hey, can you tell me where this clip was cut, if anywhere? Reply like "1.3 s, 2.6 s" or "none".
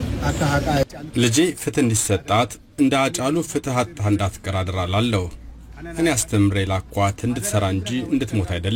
5.3 s